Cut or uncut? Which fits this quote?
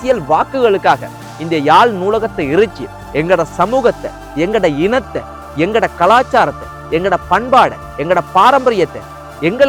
uncut